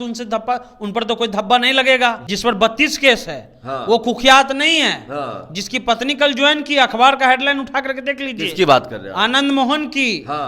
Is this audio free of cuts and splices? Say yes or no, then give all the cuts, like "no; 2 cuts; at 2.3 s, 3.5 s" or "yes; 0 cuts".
no; 1 cut; at 2.3 s